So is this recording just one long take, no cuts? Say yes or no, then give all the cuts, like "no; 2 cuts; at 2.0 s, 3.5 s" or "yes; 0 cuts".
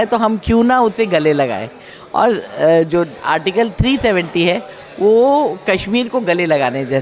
yes; 0 cuts